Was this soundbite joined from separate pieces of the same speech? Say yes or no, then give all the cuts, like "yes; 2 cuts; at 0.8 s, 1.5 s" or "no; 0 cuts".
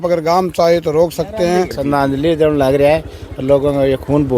yes; 1 cut; at 1.8 s